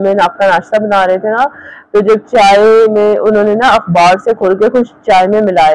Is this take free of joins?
yes; 0 cuts

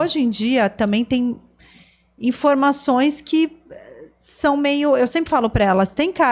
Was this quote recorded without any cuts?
yes; 0 cuts

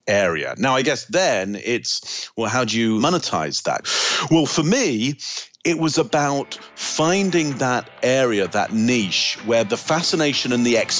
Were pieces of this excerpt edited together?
yes; 2 cuts; at 3.0 s, 9.7 s

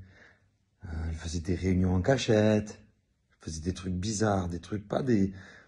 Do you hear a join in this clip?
yes; 1 cut; at 4.3 s

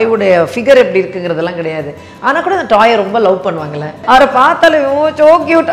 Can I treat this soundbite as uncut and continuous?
no; 1 cut; at 4.0 s

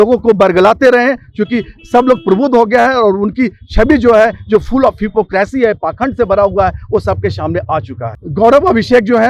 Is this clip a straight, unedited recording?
yes; 0 cuts

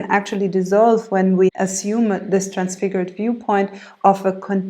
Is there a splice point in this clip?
yes; 1 cut; at 1.5 s

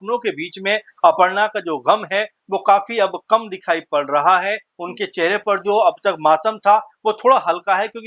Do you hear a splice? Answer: no; 0 cuts

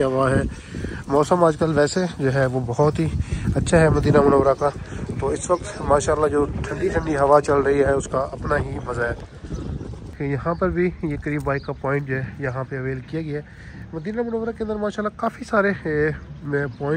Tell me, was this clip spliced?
no; 0 cuts

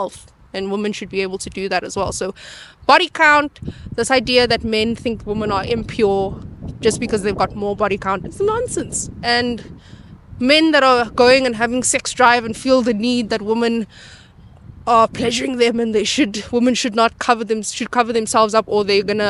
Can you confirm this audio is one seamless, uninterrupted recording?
yes; 0 cuts

